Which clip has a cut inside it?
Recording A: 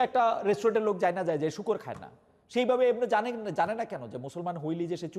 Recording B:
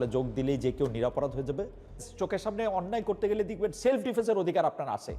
B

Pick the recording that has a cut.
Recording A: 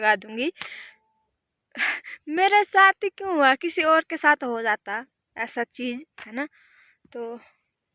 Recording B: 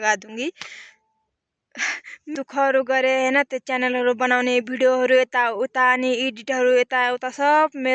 B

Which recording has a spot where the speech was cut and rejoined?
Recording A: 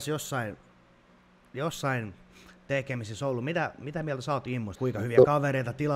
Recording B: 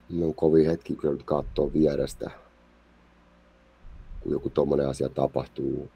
A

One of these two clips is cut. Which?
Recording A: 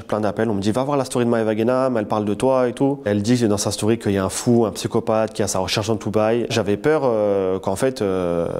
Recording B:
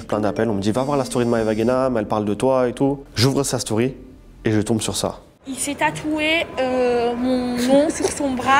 A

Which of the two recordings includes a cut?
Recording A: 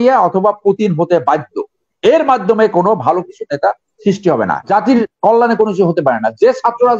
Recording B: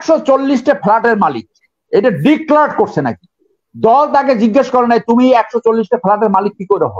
A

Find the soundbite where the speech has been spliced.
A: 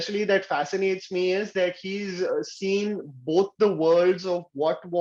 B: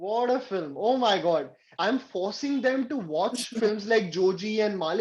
B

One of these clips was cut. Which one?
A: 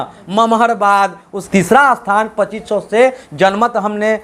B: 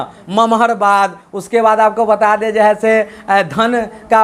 A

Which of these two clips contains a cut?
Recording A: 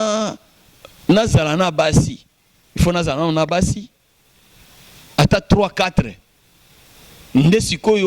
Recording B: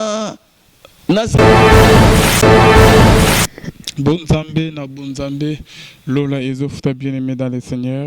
A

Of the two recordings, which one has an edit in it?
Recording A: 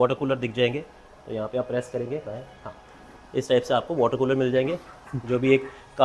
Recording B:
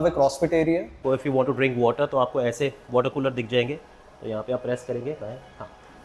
B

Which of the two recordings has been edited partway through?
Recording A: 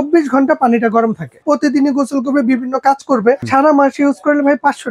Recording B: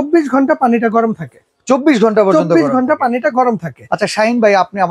A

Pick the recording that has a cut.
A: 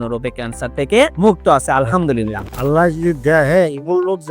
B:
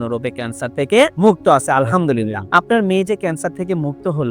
A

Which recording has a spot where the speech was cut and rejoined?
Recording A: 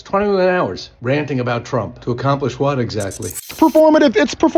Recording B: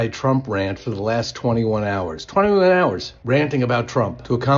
A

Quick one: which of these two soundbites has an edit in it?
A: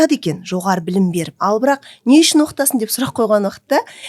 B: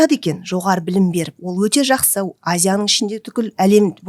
A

